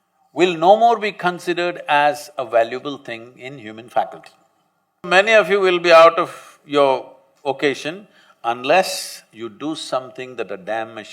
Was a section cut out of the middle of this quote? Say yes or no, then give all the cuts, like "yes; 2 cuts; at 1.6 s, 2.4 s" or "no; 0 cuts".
yes; 1 cut; at 5.1 s